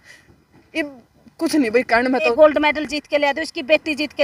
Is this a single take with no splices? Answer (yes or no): no